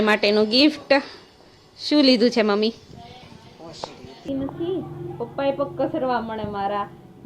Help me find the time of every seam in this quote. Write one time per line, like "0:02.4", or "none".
0:04.3